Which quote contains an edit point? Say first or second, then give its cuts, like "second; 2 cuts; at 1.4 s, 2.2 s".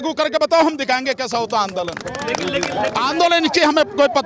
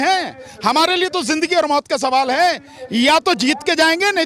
first; 1 cut; at 3.0 s